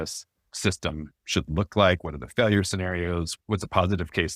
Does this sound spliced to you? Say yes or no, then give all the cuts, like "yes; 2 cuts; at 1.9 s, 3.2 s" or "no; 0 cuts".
yes; 1 cut; at 3.3 s